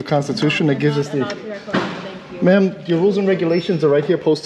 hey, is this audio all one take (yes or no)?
yes